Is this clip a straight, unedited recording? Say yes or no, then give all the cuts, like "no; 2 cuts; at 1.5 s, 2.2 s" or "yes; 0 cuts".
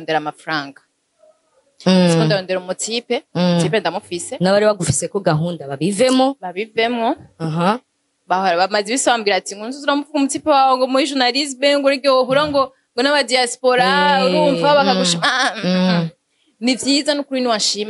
yes; 0 cuts